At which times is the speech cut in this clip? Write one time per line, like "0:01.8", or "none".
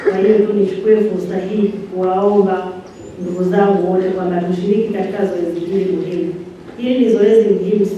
none

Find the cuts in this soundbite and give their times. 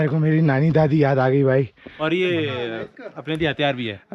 0:01.9

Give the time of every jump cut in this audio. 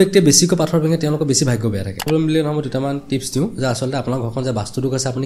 0:02.1

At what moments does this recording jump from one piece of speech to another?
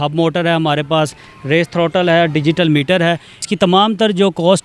0:03.4

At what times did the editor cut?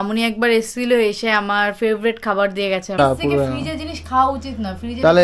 0:03.0

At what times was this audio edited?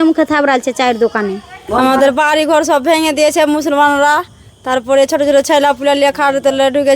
0:01.5

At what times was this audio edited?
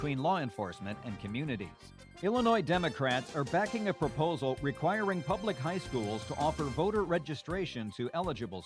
0:02.0

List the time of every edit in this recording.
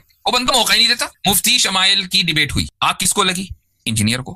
0:01.1
0:02.7

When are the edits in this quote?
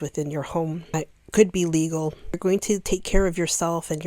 0:00.9
0:02.4

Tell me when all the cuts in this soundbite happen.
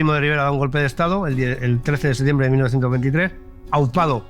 none

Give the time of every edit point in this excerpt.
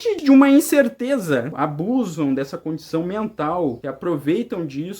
0:01.5

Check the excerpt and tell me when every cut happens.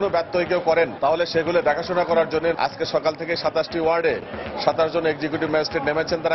0:00.9
0:02.5

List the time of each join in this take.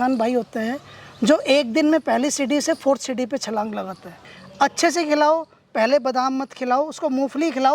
0:04.2

